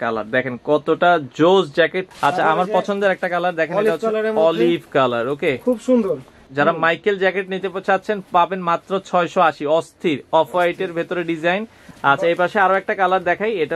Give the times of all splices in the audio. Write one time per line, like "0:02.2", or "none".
0:02.1
0:06.4
0:11.8